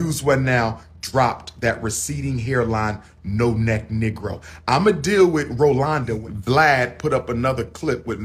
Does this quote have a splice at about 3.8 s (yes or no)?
no